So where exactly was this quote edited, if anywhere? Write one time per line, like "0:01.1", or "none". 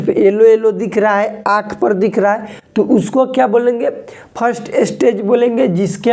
none